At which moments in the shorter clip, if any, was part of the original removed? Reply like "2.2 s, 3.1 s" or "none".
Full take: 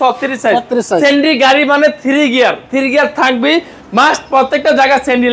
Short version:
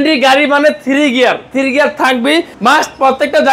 2.5 s